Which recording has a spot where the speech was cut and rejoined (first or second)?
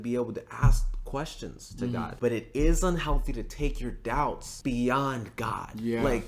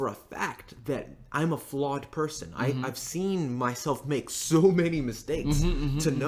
first